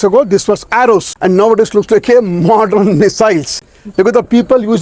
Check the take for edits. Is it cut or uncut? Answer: cut